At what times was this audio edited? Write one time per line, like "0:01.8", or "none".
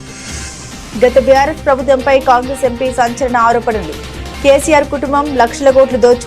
0:00.9